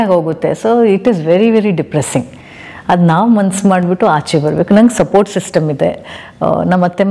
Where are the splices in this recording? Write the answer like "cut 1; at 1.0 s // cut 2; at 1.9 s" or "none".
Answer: none